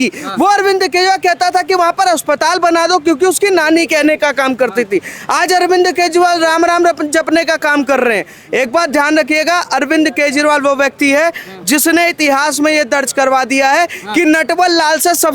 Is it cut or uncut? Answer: uncut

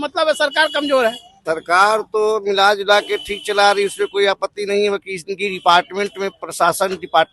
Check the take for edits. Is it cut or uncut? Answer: cut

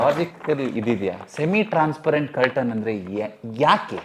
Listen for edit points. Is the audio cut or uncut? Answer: uncut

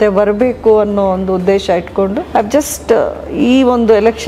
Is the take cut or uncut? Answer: cut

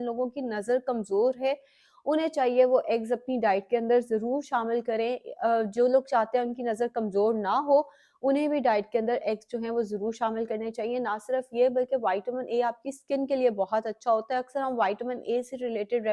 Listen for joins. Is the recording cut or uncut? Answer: uncut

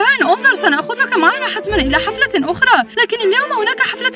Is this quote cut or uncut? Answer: uncut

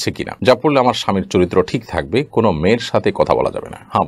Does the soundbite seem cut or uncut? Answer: uncut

